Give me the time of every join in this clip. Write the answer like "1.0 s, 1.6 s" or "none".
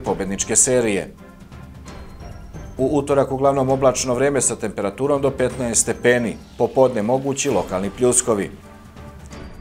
8.5 s